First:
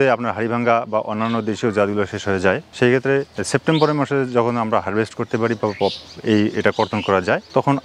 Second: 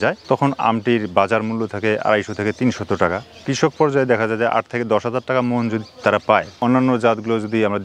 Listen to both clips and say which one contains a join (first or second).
second